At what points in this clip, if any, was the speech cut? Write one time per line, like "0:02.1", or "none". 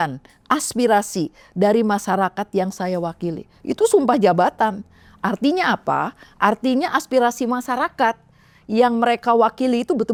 none